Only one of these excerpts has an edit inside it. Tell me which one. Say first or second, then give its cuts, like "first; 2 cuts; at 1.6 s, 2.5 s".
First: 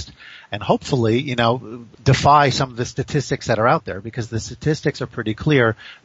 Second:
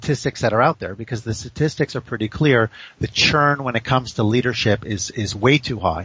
first; 1 cut; at 1.9 s